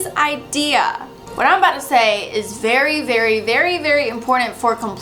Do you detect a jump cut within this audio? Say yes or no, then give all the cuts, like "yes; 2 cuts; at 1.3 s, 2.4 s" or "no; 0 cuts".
yes; 1 cut; at 1.2 s